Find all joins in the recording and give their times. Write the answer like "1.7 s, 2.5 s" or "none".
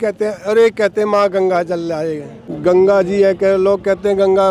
2.5 s

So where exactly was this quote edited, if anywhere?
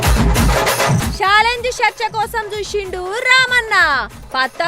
1.0 s

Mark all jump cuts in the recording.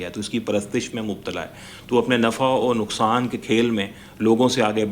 none

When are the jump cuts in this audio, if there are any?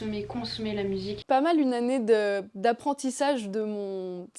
1.2 s

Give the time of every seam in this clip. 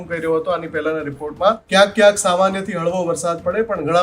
1.6 s

